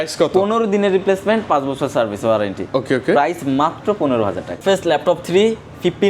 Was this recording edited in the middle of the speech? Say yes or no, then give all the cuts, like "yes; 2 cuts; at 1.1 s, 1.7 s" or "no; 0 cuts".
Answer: yes; 1 cut; at 4.6 s